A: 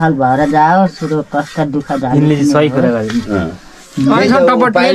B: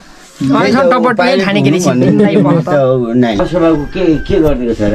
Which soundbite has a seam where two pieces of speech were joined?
B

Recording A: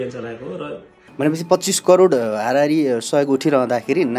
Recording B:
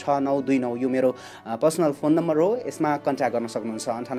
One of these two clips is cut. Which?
A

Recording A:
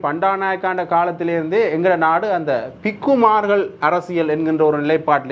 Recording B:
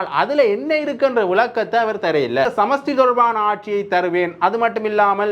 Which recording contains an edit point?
B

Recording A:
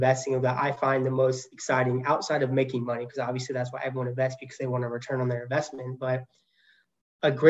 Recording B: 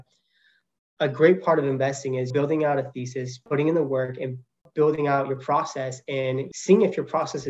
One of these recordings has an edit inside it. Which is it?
B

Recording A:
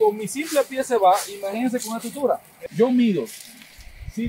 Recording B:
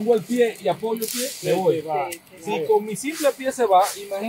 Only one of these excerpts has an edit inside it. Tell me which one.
A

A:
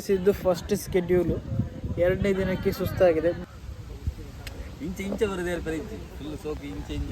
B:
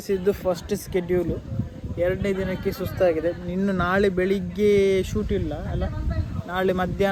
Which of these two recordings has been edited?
A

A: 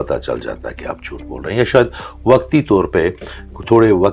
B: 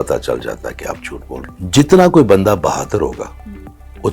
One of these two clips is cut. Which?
B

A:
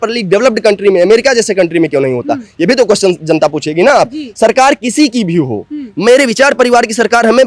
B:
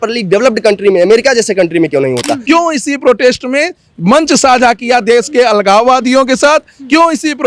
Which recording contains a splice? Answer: B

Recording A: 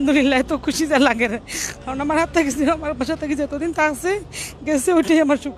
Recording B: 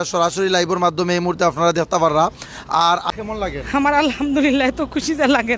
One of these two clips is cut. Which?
B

